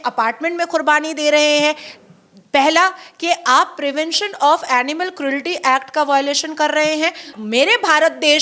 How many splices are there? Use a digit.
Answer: 1